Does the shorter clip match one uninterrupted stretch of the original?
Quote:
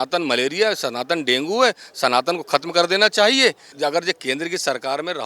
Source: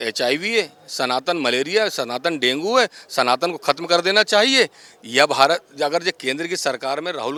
no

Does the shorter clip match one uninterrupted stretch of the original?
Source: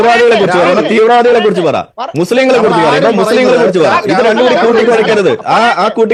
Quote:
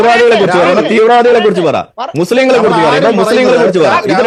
yes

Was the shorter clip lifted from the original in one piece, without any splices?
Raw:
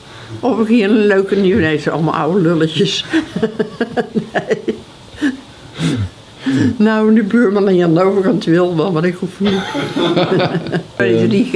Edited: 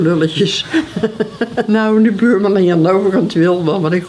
no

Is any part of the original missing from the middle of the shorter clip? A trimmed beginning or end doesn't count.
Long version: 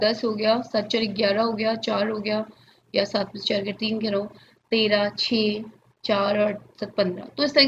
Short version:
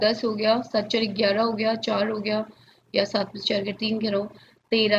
no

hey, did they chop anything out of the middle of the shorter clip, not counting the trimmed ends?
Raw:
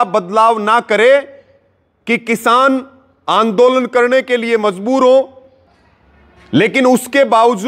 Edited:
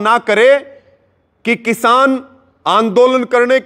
no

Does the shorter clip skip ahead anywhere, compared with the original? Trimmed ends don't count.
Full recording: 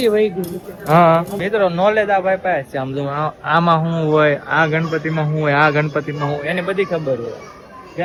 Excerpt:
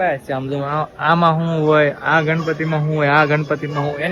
no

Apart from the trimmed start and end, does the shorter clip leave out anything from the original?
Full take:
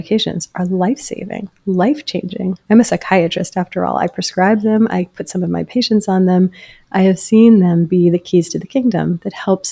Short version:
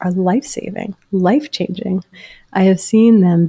yes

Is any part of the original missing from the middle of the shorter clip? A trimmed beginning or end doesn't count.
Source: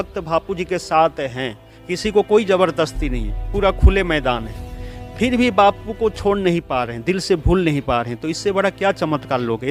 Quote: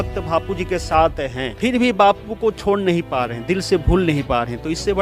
yes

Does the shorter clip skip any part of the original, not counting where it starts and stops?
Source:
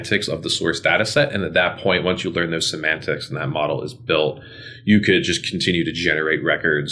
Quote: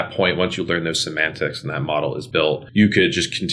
yes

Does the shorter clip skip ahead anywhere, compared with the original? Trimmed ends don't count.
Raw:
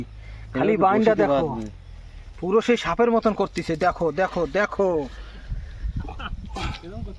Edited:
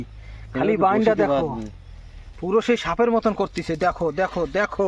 no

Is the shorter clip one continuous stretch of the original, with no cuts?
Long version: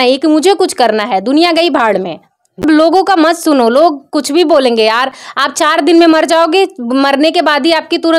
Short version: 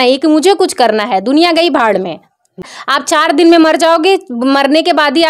no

